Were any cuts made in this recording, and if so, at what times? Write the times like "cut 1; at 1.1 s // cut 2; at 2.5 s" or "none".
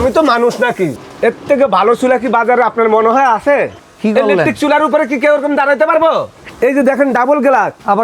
cut 1; at 1.0 s // cut 2; at 3.8 s // cut 3; at 6.4 s